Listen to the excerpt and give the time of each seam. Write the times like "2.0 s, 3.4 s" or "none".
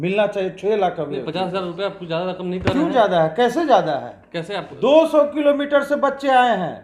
none